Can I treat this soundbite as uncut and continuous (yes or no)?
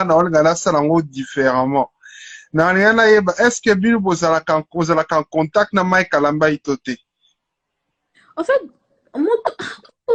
yes